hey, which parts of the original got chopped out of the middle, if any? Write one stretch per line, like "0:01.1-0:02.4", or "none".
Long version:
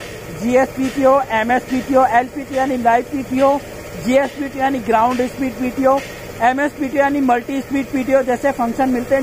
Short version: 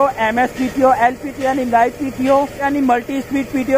0:03.8-0:07.1